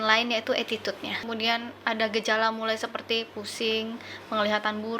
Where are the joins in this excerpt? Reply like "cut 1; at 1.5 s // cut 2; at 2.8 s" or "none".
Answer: cut 1; at 1.2 s